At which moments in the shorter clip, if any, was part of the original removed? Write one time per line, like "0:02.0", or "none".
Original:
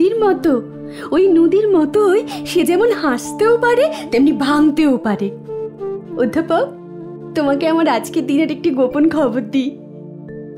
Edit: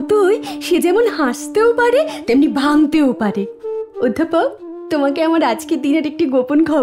0:03.9
0:04.7

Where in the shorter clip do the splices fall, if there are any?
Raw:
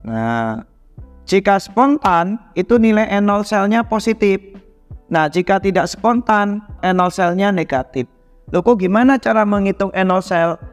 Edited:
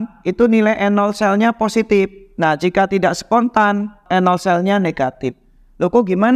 0:02.2

